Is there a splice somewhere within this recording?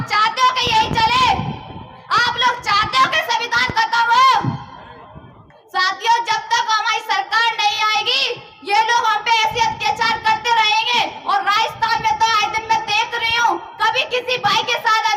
no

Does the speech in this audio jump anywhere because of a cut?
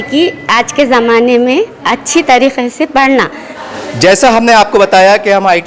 no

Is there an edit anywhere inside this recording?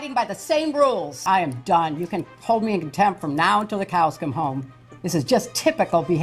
yes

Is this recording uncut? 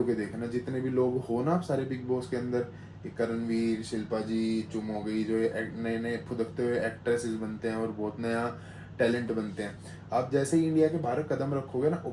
yes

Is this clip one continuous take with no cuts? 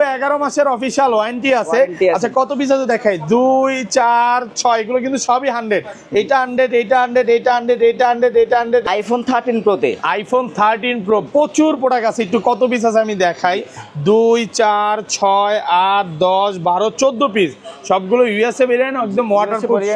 no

